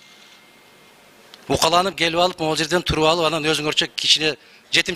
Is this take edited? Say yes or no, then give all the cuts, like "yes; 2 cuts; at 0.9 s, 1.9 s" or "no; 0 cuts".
no; 0 cuts